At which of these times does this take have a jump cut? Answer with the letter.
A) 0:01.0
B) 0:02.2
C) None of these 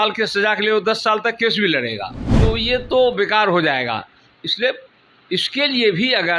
B